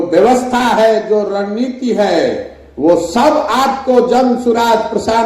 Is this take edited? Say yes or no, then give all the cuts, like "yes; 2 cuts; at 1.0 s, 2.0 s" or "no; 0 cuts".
no; 0 cuts